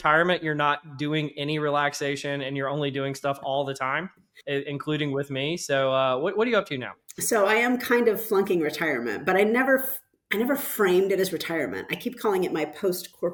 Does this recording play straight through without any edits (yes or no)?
yes